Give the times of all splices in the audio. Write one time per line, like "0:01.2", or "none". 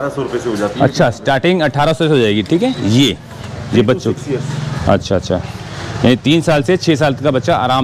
none